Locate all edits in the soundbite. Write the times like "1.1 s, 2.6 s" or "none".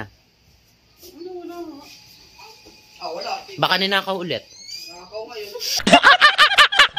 5.8 s